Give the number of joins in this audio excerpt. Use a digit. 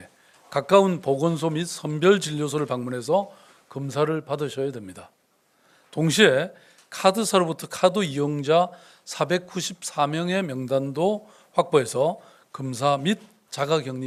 0